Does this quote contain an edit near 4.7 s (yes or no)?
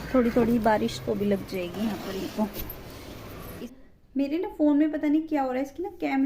no